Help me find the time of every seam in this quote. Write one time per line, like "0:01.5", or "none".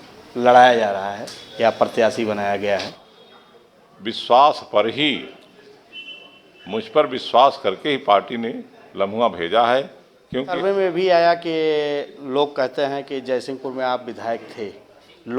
0:03.3
0:10.5